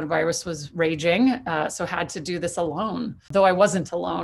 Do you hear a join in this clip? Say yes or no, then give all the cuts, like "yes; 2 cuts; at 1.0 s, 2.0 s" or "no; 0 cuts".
yes; 1 cut; at 3.3 s